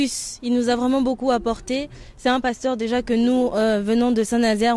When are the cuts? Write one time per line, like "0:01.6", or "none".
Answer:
none